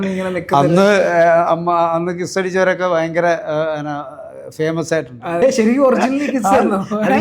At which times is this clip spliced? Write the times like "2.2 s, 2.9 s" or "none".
5.4 s